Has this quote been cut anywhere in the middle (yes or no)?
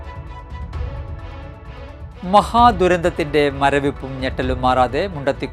yes